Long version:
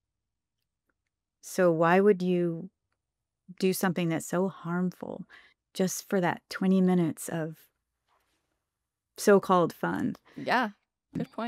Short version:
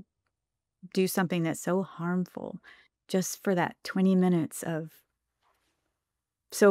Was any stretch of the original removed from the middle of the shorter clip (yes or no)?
no